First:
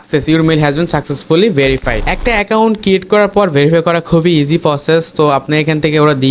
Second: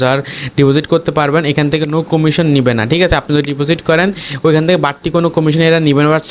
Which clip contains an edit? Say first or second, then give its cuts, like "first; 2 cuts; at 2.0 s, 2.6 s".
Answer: first; 1 cut; at 2.5 s